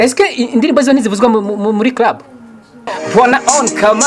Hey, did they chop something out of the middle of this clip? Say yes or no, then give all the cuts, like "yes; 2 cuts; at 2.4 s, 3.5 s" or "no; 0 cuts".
yes; 1 cut; at 3.0 s